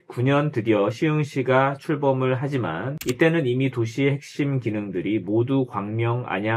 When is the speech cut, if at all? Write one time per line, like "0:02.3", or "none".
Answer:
none